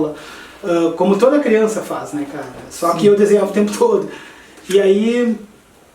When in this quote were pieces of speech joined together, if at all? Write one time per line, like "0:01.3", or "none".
none